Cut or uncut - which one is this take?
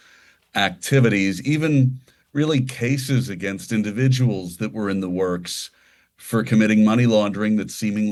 uncut